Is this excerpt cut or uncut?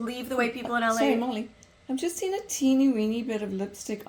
uncut